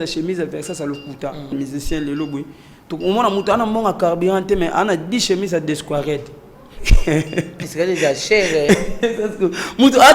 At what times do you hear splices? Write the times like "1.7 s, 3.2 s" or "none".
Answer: 1.5 s